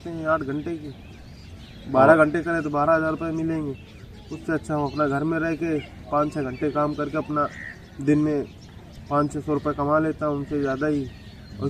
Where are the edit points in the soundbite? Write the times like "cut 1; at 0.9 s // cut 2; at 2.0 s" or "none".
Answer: none